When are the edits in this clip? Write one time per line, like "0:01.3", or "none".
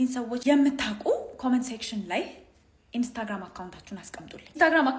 none